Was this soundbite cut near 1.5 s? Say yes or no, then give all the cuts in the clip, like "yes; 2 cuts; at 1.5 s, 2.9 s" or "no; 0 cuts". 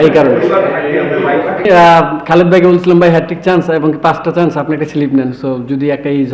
yes; 1 cut; at 1.5 s